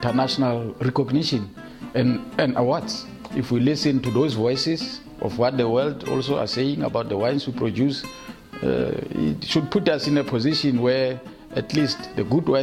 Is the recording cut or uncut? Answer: cut